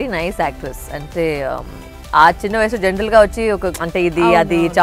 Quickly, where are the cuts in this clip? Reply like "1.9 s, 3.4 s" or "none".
3.8 s

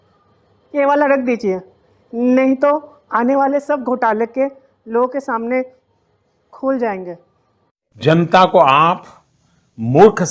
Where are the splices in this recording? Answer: none

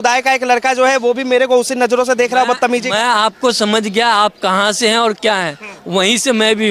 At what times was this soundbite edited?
none

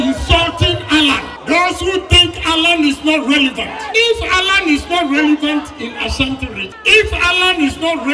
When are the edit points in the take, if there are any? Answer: 1.3 s, 3.8 s, 6.7 s

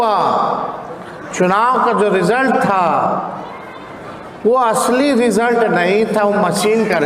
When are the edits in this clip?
none

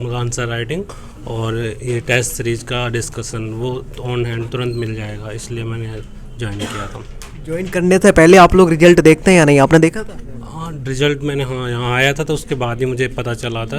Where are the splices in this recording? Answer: none

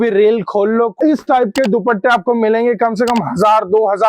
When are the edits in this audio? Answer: 0.9 s

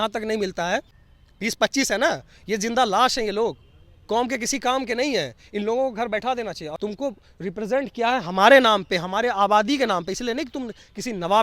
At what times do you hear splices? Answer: 1.0 s, 6.7 s

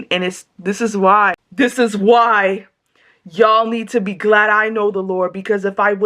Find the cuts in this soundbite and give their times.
1.4 s

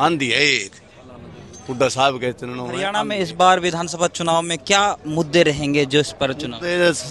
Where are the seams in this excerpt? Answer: 2.8 s

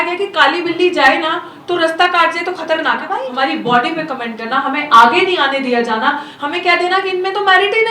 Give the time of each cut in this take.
3.1 s

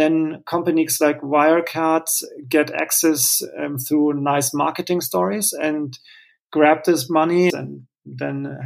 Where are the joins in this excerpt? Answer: 7.5 s

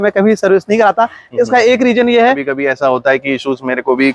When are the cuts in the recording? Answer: 2.5 s

